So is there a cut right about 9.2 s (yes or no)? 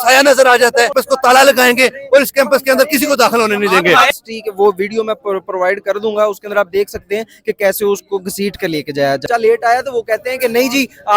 yes